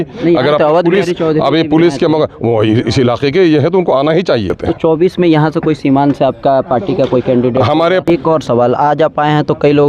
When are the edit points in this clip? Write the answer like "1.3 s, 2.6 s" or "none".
4.6 s, 8.0 s